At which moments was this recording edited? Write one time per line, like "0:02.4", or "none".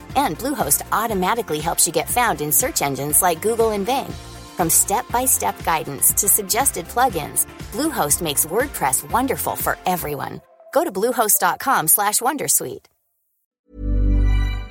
0:13.6